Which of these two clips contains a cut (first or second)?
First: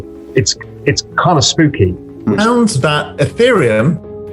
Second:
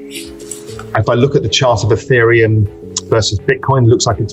first